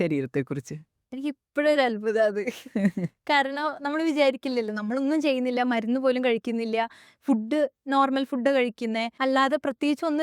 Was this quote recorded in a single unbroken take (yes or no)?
no